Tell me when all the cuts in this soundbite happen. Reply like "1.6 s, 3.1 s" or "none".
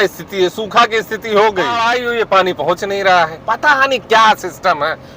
1.9 s